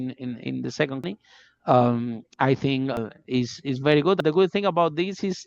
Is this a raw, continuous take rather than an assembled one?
no; 3 cuts; at 1.0 s, 2.9 s, 4.2 s

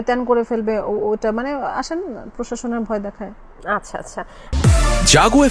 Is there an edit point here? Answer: no; 0 cuts

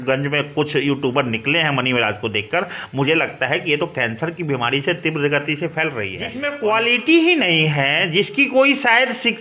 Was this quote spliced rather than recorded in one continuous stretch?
yes; 1 cut; at 6.4 s

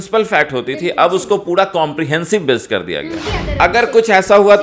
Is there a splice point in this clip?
yes; 1 cut; at 3.3 s

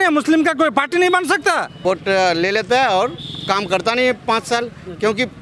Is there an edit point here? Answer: yes; 1 cut; at 1.8 s

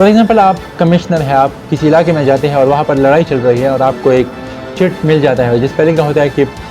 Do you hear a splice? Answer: no; 0 cuts

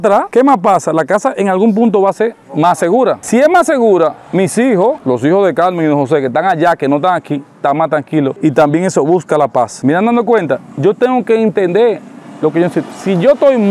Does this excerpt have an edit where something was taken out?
no; 0 cuts

